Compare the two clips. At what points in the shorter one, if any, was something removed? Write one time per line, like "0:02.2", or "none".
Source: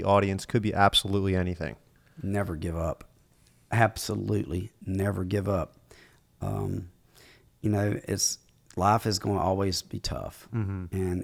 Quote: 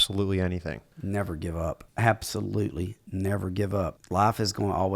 0:00.9
0:01.9
0:04.0